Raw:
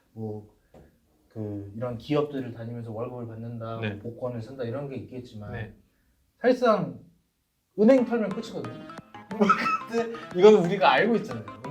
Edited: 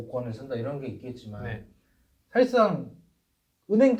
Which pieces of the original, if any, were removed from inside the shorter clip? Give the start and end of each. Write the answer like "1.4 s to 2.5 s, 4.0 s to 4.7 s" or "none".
none